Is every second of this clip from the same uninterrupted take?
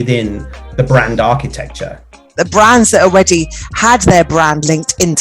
no; 1 cut; at 2.4 s

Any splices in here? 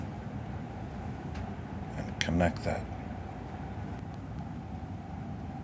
no; 0 cuts

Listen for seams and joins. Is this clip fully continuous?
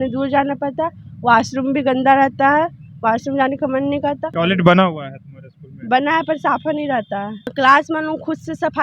no; 2 cuts; at 4.3 s, 7.5 s

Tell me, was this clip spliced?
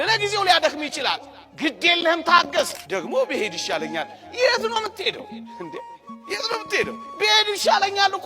yes; 1 cut; at 2.8 s

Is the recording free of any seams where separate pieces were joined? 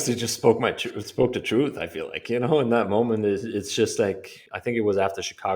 no; 1 cut; at 4.3 s

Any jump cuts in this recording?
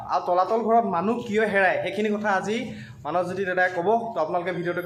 no; 0 cuts

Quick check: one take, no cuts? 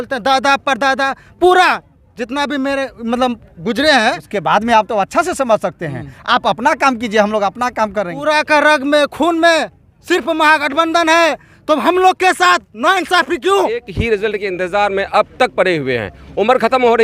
no; 3 cuts; at 4.3 s, 8.2 s, 13.9 s

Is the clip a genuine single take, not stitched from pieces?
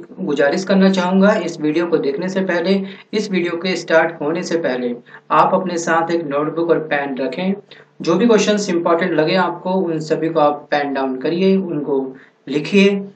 no; 1 cut; at 10.3 s

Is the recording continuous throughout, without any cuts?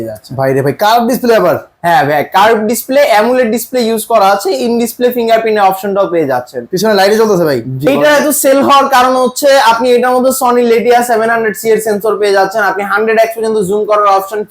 no; 1 cut; at 7.9 s

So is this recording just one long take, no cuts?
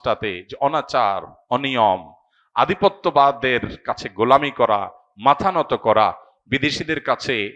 yes; 0 cuts

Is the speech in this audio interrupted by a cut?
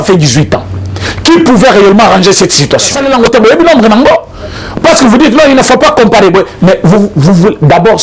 yes; 1 cut; at 3.0 s

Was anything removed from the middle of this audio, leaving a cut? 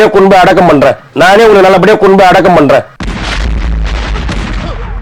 no; 0 cuts

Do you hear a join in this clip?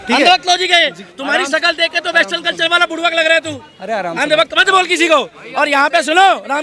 no; 0 cuts

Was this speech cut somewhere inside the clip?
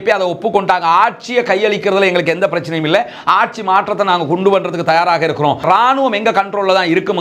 yes; 1 cut; at 5.6 s

